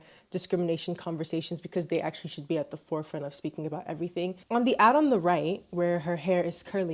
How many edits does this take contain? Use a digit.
1